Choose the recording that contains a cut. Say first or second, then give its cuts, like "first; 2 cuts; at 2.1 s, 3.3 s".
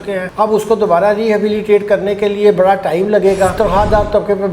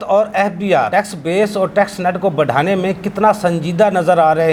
first; 1 cut; at 3.6 s